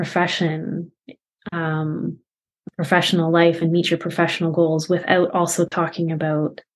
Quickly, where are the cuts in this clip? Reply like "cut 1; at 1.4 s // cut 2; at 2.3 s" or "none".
none